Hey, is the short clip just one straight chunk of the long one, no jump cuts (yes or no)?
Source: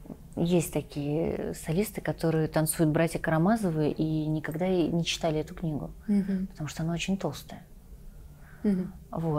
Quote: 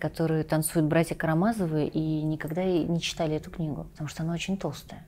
no